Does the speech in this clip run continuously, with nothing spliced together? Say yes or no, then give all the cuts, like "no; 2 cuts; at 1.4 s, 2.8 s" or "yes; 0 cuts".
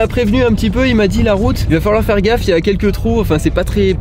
no; 1 cut; at 1.6 s